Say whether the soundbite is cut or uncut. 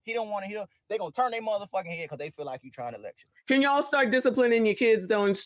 uncut